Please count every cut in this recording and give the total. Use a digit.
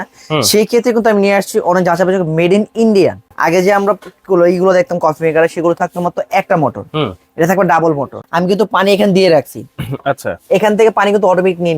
2